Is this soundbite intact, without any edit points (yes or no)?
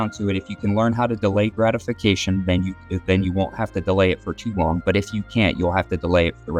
yes